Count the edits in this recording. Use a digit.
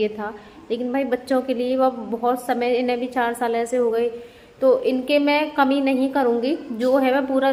0